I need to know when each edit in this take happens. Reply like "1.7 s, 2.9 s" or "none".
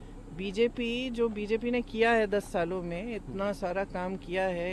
none